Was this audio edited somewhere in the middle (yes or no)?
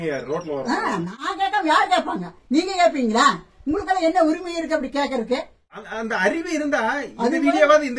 yes